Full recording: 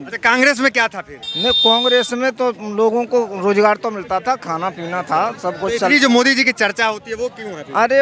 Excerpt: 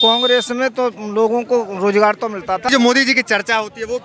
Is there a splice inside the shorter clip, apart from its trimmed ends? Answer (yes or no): yes